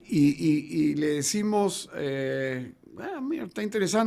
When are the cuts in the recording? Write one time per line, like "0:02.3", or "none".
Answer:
none